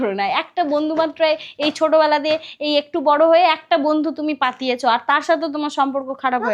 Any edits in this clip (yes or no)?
no